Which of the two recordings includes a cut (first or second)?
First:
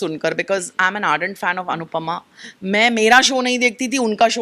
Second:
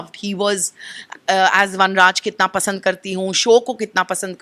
second